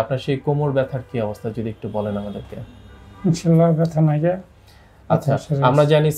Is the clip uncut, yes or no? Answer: yes